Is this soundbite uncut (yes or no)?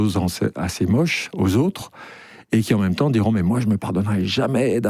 yes